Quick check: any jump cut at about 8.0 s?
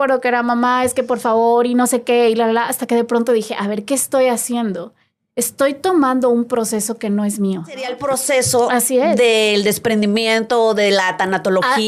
yes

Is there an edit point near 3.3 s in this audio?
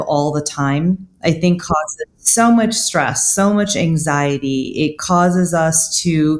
no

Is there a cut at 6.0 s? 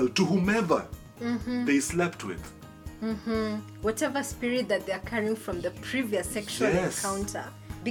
no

